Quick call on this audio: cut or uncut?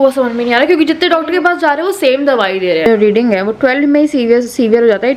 cut